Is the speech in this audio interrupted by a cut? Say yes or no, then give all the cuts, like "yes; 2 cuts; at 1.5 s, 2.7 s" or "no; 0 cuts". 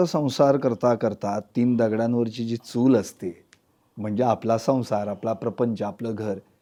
no; 0 cuts